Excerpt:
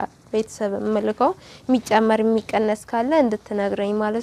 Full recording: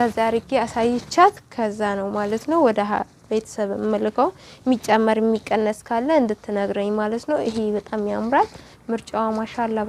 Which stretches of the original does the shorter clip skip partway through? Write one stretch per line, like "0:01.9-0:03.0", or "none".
none